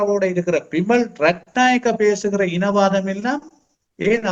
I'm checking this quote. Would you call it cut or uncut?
uncut